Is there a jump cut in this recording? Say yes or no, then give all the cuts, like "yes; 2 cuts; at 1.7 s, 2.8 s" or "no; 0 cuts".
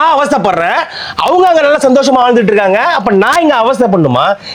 no; 0 cuts